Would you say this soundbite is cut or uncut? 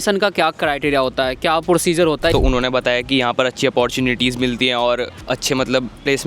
cut